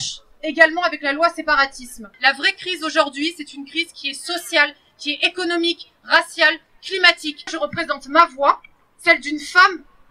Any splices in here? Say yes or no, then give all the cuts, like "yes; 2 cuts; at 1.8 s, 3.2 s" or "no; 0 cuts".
yes; 2 cuts; at 2.0 s, 7.5 s